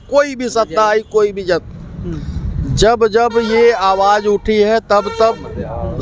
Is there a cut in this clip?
no; 0 cuts

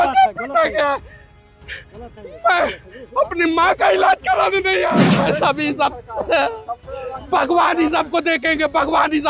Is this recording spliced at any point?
yes; 1 cut; at 5.1 s

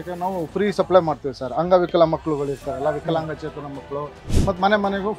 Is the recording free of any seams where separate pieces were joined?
no; 1 cut; at 4.3 s

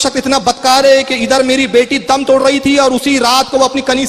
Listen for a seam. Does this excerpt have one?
no; 0 cuts

